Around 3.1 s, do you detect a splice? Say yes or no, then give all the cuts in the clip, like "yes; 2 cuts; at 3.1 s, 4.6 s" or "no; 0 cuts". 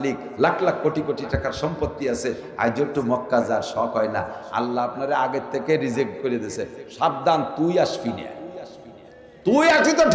no; 0 cuts